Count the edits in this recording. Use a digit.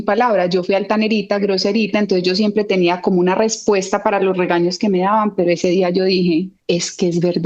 1